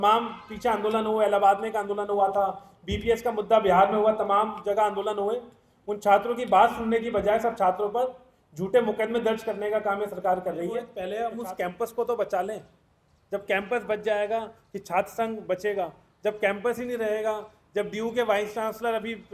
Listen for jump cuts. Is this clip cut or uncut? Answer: cut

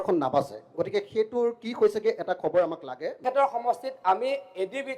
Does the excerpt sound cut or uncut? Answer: cut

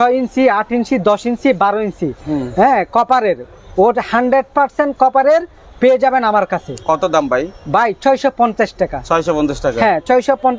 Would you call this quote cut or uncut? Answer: uncut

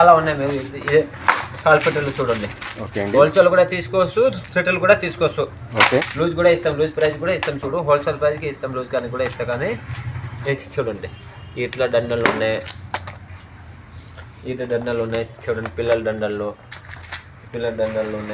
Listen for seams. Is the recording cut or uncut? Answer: uncut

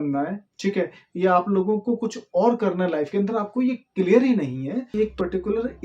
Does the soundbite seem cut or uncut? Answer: cut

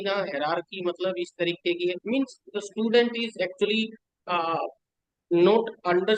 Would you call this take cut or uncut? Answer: uncut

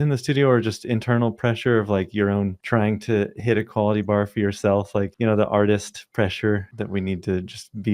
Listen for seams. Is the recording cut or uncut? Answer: cut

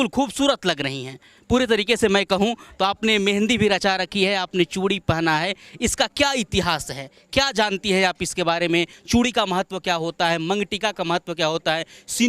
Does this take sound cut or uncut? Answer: uncut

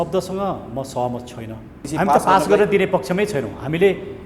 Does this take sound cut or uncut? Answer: cut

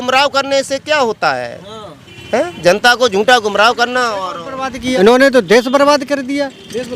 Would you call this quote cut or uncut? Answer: cut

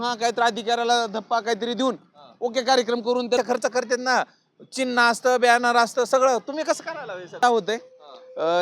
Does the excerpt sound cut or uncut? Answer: cut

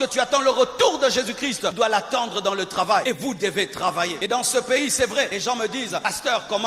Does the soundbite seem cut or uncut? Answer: cut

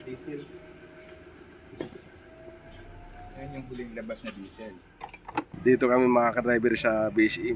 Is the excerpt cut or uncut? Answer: cut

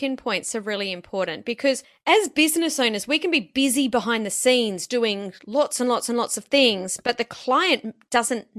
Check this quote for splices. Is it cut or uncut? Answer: uncut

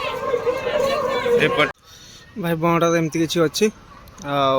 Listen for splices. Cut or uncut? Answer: cut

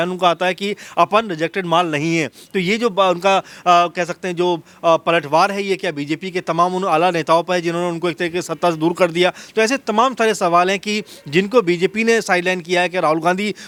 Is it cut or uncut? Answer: uncut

